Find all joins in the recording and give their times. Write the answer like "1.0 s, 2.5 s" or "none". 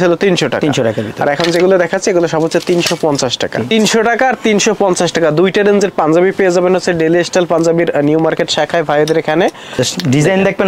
3.7 s, 9.6 s